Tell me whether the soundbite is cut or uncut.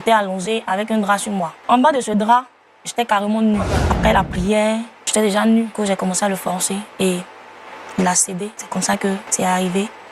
cut